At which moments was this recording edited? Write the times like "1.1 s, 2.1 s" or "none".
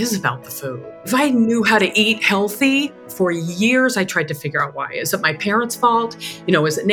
1.0 s, 3.0 s